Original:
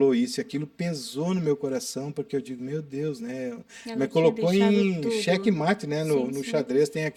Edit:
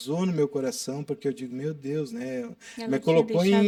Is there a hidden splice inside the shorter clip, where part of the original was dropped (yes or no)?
no